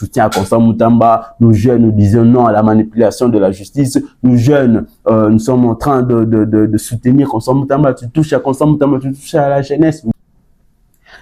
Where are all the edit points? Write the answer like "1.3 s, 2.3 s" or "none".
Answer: 10.1 s